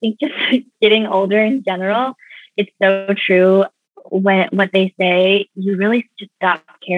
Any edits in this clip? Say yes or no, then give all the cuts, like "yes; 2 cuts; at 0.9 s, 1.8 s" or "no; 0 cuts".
no; 0 cuts